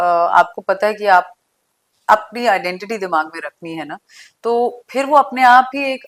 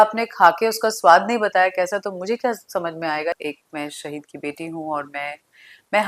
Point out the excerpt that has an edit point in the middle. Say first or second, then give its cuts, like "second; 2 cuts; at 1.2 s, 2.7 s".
second; 1 cut; at 3.3 s